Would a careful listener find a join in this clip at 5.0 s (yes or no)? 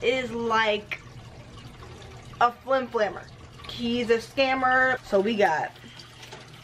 yes